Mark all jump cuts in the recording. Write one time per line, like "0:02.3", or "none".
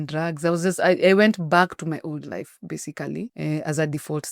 0:03.3